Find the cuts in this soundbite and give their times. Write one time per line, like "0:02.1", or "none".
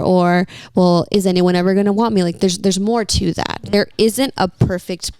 0:03.6